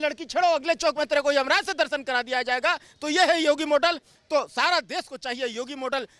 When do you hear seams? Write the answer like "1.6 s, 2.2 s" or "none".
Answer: 4.1 s